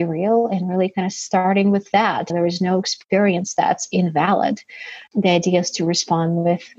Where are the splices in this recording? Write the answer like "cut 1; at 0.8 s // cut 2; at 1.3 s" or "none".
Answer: cut 1; at 2.3 s